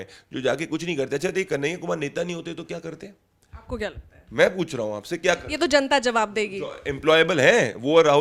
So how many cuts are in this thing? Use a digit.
0